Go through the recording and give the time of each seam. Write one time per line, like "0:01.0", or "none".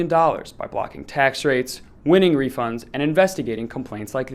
none